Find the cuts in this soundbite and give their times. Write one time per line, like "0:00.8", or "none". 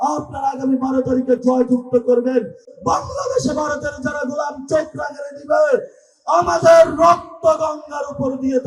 0:02.6